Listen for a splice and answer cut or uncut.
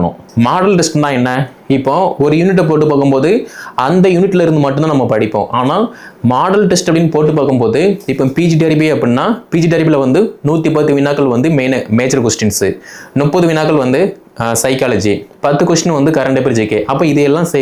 uncut